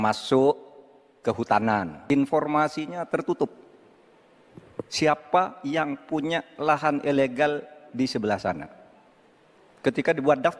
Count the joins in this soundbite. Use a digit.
1